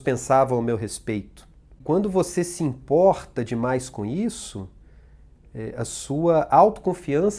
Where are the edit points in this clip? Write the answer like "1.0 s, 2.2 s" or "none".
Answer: 1.8 s